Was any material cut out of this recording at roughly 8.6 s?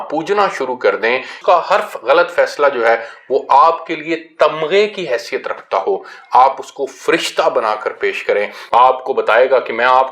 yes; 2 cuts; at 1.3 s, 8.6 s

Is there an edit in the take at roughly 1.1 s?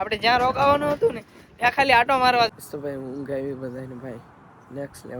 no; 1 cut; at 2.5 s

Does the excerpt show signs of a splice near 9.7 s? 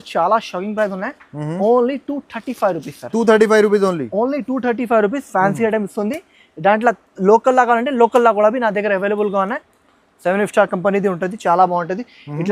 yes; 1 cut; at 9.7 s

